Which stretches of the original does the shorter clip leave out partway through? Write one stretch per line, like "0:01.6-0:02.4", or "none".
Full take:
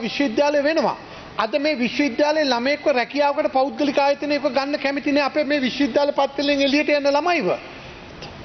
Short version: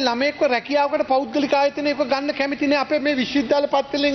none